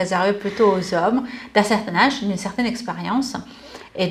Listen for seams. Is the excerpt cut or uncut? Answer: uncut